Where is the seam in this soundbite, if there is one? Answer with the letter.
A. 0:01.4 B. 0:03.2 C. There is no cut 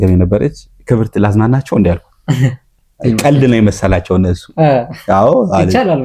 C